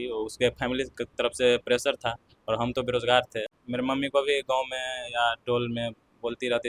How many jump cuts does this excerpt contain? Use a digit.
1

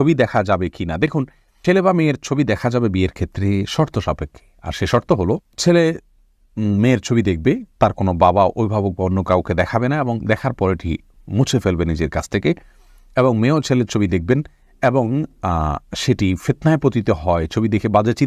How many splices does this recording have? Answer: 0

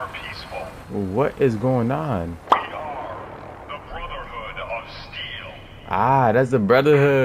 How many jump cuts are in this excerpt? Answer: 2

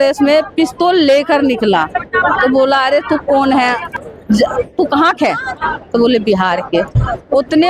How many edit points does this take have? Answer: 1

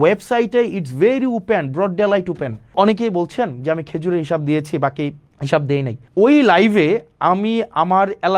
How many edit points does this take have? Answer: 3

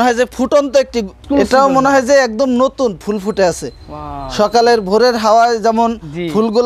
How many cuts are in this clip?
1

